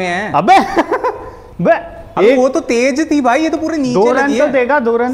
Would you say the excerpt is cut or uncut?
uncut